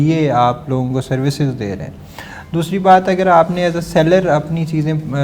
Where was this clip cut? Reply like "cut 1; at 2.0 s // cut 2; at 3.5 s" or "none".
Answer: none